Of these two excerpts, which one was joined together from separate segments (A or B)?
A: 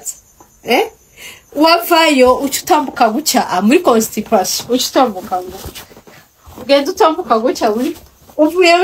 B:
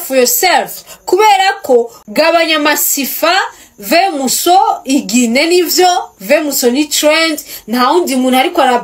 B